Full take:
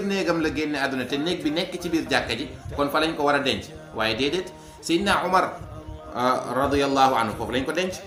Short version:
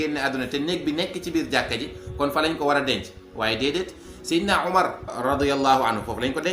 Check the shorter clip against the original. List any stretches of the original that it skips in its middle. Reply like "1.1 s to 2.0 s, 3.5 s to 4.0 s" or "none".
5.7 s to 6.5 s